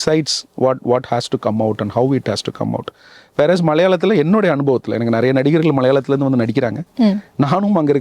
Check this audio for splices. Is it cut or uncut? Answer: uncut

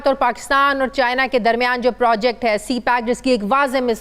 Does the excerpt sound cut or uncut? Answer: uncut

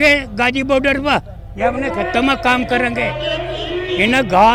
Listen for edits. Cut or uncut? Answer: uncut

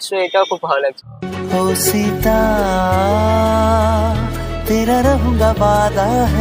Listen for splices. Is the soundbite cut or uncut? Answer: uncut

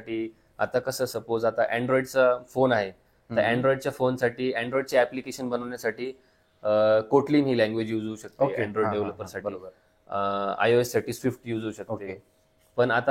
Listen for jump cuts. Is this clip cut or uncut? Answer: uncut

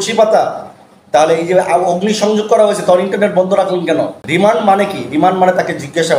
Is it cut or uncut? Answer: cut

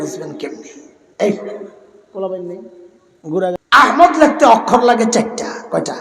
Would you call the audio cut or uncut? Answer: cut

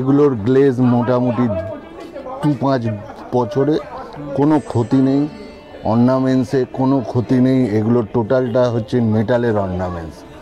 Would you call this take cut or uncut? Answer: uncut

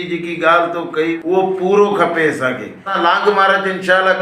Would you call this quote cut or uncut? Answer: cut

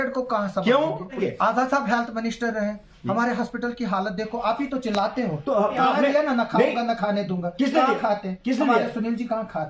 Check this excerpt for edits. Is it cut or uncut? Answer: cut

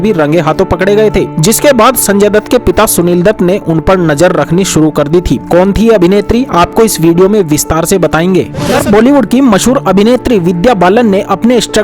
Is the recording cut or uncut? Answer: cut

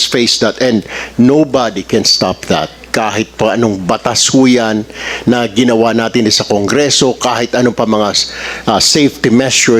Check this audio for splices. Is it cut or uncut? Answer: uncut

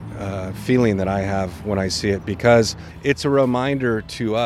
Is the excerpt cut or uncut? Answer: cut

